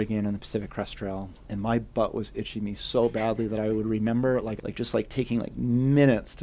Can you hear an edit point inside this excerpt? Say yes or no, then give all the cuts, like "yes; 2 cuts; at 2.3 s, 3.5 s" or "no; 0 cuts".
yes; 2 cuts; at 1.4 s, 4.5 s